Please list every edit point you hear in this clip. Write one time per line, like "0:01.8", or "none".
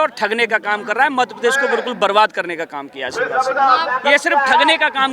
0:03.8